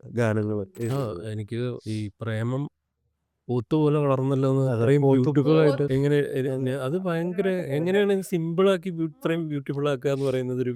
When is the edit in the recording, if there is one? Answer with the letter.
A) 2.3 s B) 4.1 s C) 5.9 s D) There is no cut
C